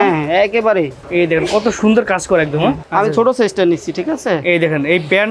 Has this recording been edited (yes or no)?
yes